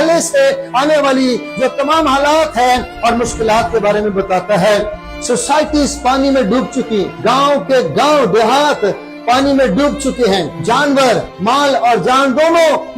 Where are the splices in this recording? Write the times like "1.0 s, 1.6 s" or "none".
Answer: 5.0 s, 7.1 s, 10.5 s, 11.3 s